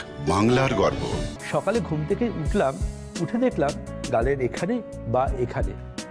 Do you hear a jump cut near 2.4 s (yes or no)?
no